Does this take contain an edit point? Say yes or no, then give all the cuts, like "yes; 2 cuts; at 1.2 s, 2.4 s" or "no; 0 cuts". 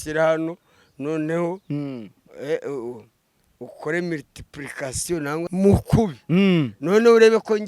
yes; 1 cut; at 5.4 s